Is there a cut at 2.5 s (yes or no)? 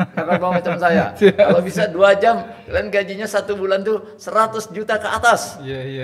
no